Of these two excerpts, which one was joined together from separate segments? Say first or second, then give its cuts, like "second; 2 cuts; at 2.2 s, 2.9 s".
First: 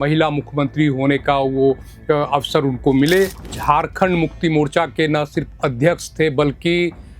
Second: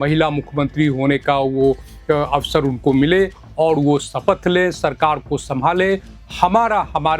first; 1 cut; at 3.4 s